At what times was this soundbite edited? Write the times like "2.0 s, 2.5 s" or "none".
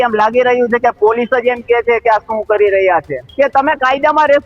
3.2 s